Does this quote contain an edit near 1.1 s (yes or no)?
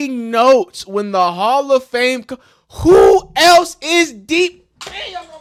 no